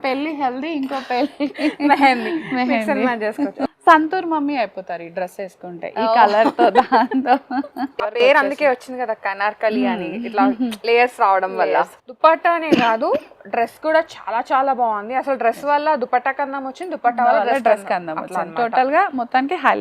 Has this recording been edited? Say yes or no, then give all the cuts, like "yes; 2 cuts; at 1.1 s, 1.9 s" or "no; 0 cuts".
yes; 3 cuts; at 3.6 s, 8.1 s, 11.9 s